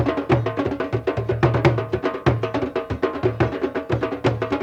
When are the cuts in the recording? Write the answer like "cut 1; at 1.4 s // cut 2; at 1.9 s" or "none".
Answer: none